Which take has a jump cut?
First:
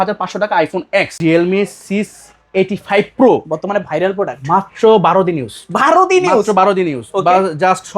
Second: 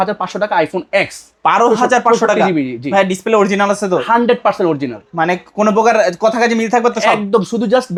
first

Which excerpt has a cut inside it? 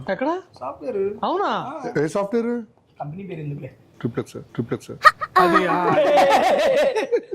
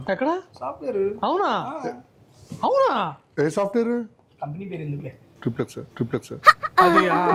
first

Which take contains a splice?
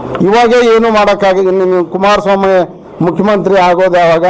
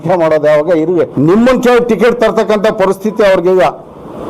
second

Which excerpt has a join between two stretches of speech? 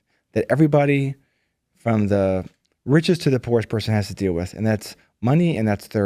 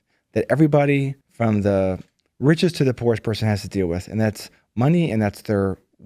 second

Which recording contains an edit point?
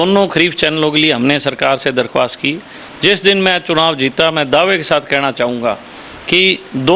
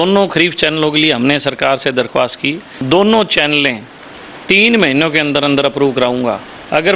second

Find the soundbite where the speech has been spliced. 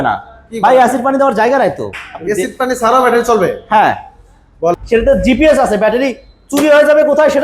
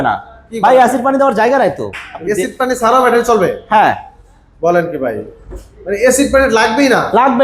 first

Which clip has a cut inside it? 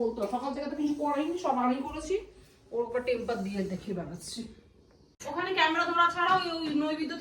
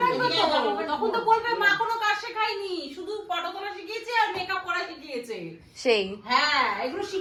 first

